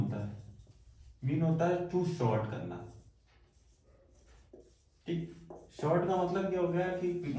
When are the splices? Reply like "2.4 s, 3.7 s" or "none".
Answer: 5.6 s

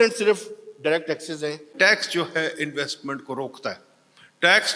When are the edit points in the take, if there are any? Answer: 1.7 s

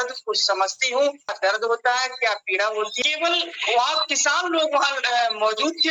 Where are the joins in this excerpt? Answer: 1.3 s, 2.9 s

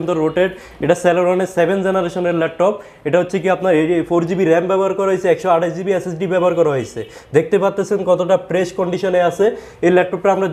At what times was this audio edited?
none

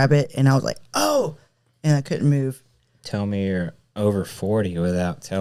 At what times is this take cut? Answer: none

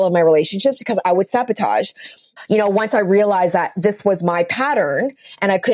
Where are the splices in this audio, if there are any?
2.3 s

